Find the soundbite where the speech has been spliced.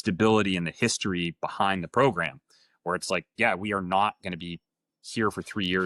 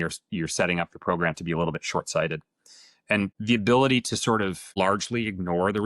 second; 2 cuts; at 3.4 s, 4.7 s

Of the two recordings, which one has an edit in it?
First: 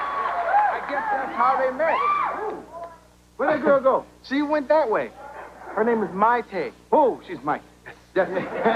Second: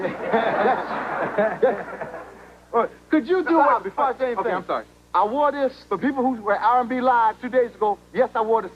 second; 1 cut; at 4.2 s

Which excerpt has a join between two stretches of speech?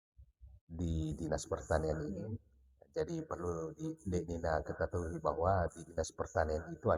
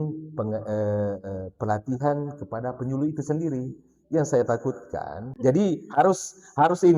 second; 1 cut; at 5.2 s

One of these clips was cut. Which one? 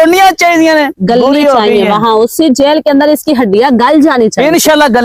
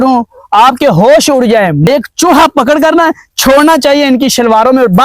second; 1 cut; at 1.9 s

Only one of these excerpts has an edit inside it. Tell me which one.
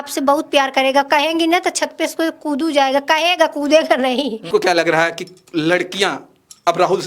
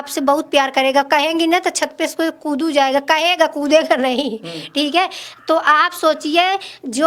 first; 1 cut; at 4.5 s

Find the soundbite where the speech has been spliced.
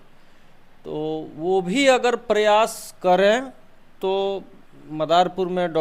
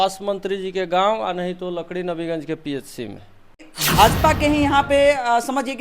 second; 1 cut; at 3.8 s

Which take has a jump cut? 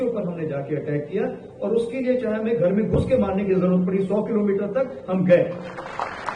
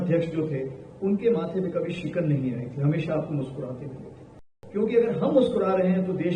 second; 1 cut; at 4.5 s

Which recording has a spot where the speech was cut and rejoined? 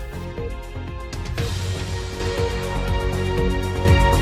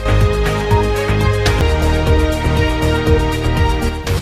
second; 1 cut; at 1.6 s

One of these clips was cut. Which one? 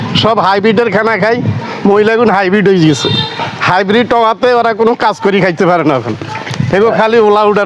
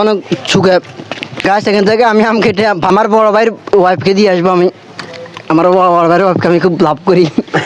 second; 2 cuts; at 1.3 s, 2.9 s

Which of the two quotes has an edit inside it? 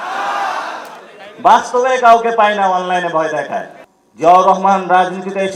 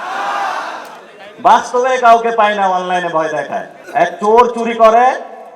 second; 1 cut; at 3.7 s

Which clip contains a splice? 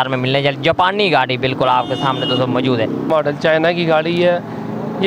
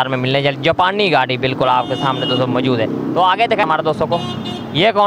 first; 1 cut; at 3.0 s

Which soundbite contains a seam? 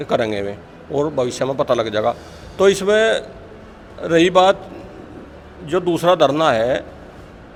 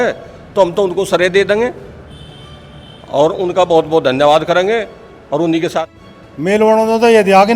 second; 1 cut; at 5.8 s

